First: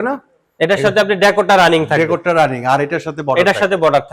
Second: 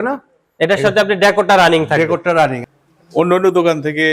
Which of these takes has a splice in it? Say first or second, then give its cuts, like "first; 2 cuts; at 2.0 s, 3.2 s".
second; 1 cut; at 2.6 s